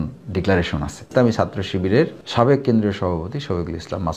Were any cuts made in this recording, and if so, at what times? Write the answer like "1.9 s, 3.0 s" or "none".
1.1 s, 2.2 s